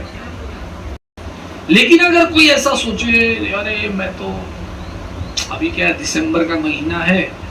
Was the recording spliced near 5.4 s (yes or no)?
no